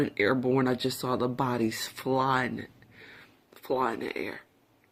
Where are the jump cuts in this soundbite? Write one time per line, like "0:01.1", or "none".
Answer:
none